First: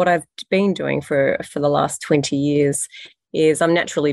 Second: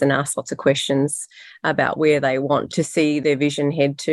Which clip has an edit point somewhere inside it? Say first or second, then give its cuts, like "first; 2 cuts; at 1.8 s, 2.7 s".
second; 1 cut; at 2.8 s